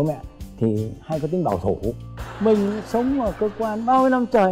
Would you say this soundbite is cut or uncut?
cut